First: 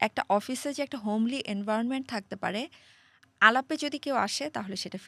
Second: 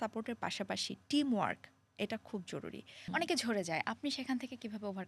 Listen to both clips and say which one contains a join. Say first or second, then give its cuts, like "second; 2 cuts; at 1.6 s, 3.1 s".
second; 1 cut; at 3.1 s